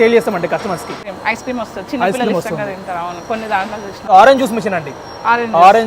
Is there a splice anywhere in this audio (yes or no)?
yes